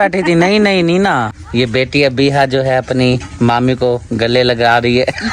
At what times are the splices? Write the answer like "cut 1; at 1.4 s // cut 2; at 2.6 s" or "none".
cut 1; at 1.4 s